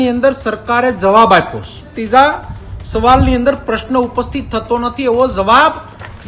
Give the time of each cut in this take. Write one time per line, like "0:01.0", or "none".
0:01.9